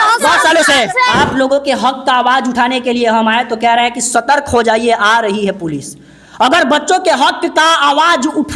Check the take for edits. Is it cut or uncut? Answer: cut